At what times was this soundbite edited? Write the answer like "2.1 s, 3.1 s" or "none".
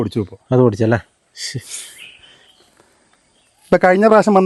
none